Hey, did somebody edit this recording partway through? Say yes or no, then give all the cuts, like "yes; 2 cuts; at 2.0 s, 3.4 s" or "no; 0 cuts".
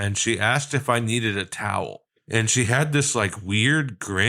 yes; 1 cut; at 2.1 s